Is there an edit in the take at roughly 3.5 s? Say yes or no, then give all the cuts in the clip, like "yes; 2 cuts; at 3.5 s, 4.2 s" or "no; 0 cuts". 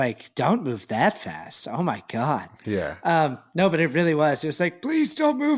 no; 0 cuts